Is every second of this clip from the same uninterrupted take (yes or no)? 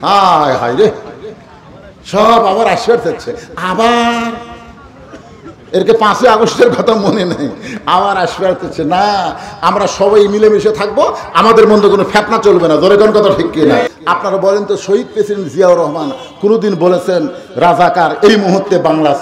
no